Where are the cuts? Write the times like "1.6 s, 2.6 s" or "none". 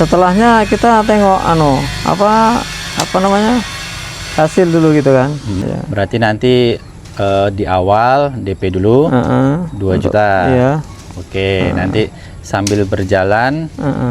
5.5 s